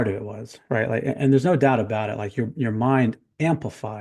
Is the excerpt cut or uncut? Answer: uncut